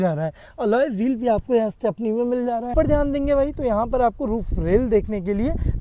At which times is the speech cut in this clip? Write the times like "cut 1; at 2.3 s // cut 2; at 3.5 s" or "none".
cut 1; at 2.7 s